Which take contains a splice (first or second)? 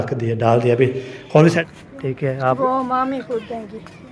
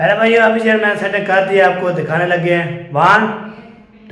first